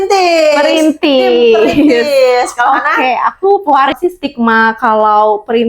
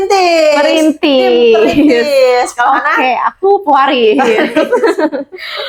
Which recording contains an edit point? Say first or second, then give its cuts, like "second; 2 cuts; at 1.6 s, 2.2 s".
first; 1 cut; at 3.9 s